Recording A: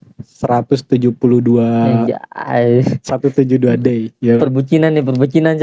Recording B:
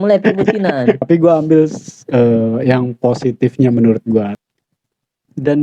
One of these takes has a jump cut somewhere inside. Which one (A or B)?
B